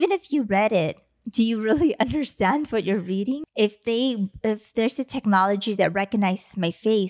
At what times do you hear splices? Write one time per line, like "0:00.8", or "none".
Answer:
0:03.4